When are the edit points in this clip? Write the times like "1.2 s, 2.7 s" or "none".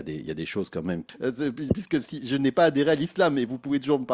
1.1 s

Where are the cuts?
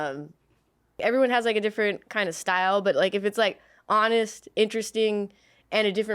1.0 s

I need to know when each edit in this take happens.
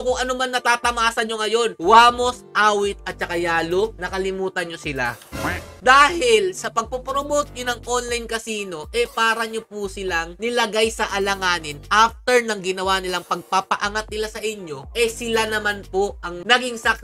none

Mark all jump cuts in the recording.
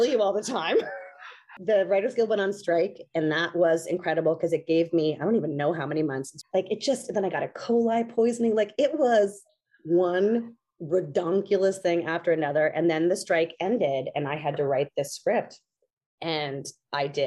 1.5 s, 6.3 s

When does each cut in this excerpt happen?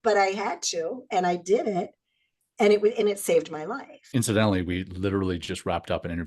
4.1 s

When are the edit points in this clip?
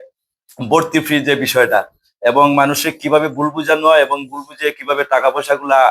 none

